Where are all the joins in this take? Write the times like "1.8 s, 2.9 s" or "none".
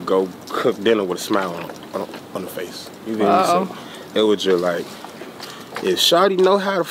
none

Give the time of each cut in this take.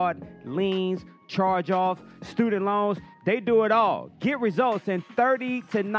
none

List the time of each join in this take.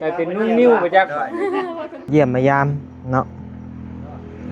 2.1 s

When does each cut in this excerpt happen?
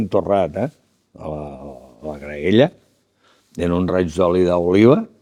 none

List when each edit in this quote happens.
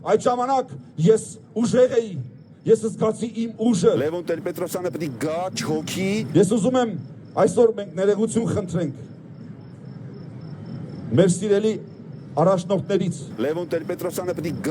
4.0 s, 6.3 s, 13.3 s

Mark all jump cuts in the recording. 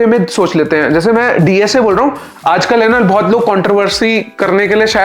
2.3 s

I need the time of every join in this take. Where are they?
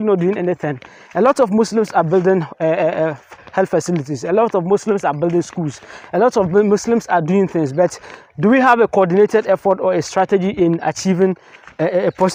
none

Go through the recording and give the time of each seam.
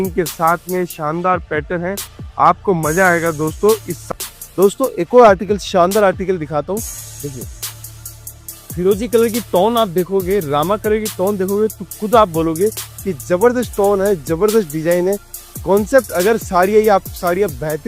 4.0 s

